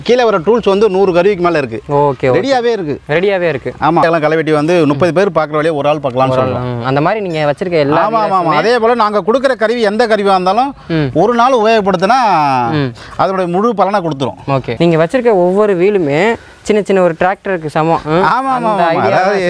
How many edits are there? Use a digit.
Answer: 2